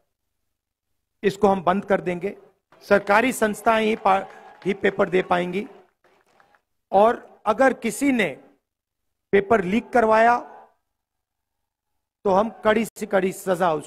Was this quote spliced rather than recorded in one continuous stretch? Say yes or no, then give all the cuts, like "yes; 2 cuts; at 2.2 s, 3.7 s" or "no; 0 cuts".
yes; 1 cut; at 13.0 s